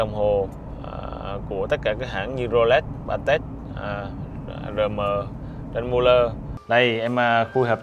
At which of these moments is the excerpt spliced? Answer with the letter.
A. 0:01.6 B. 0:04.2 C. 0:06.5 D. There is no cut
C